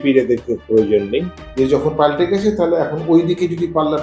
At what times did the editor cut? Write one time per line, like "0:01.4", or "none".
0:01.4